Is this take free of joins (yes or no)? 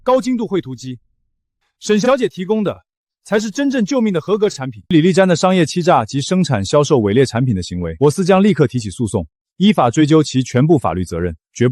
no